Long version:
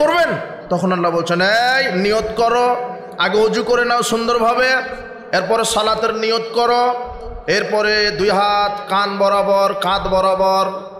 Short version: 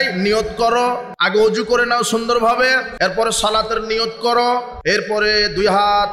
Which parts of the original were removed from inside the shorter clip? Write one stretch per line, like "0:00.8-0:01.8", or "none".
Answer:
0:02.9-0:03.1
0:04.9-0:05.2
0:07.1-0:07.4